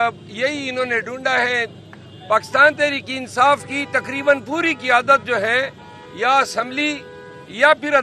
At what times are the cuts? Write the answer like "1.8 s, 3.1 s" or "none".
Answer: none